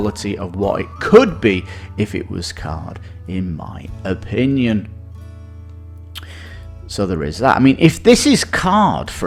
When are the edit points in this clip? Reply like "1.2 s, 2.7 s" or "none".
none